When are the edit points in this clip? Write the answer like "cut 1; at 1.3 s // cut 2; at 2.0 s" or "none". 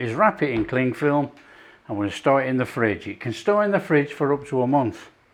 none